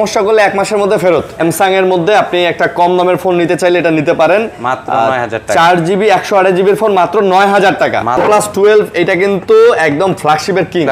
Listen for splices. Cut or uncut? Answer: cut